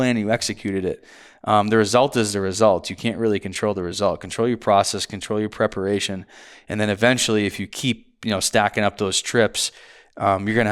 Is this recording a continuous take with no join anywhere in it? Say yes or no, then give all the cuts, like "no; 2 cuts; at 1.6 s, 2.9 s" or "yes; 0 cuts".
yes; 0 cuts